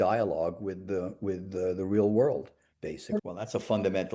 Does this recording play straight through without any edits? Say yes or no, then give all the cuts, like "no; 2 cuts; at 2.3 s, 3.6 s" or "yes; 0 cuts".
no; 1 cut; at 3.2 s